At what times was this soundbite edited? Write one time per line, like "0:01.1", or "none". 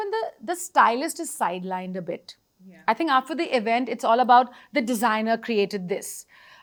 none